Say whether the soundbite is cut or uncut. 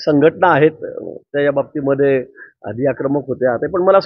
uncut